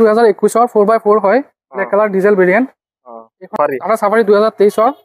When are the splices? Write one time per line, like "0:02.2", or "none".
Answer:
0:03.5